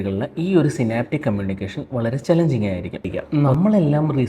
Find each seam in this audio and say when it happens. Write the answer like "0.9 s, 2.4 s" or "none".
3.1 s